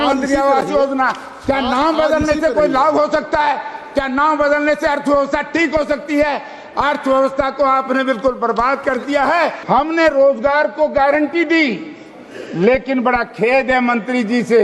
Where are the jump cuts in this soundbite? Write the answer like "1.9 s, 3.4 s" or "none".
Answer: 9.6 s

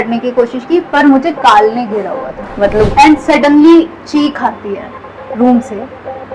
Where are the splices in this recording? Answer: 2.9 s

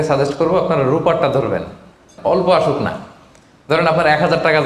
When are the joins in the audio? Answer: 2.1 s

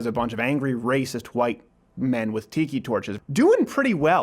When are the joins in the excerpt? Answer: 3.2 s

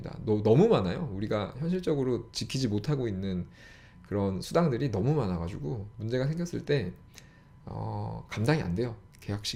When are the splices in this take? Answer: none

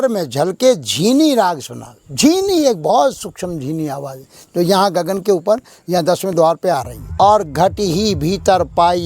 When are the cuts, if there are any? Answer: 7.0 s

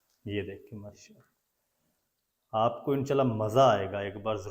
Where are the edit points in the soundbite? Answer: none

